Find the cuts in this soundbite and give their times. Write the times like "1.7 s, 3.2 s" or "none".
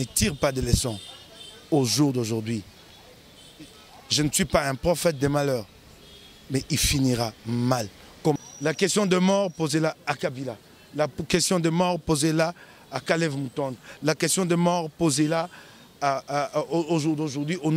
8.4 s